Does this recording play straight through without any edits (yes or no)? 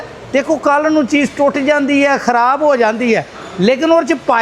yes